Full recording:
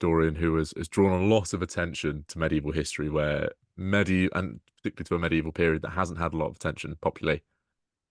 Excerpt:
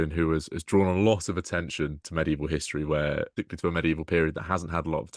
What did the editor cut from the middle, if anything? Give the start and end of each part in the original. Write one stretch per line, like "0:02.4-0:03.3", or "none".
0:03.6-0:04.9